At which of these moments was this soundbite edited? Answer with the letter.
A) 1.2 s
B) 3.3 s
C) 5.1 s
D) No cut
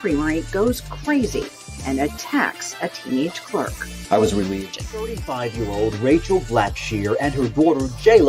C